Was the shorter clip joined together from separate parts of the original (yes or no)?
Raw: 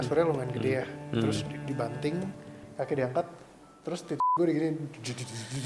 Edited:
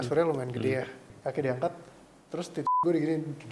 yes